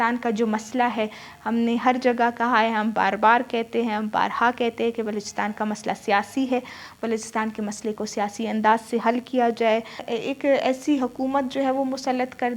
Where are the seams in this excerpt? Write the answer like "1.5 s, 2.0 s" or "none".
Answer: 10.1 s